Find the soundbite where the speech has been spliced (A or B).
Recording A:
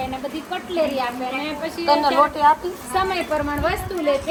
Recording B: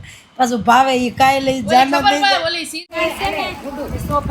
B